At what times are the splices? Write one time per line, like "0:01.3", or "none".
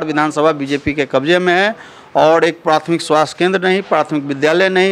none